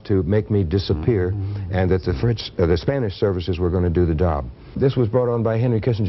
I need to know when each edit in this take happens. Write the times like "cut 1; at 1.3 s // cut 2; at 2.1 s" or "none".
cut 1; at 4.7 s